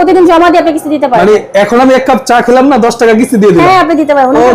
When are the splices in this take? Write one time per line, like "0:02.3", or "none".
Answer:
none